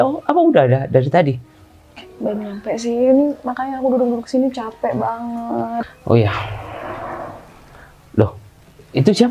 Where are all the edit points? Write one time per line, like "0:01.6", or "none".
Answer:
0:05.7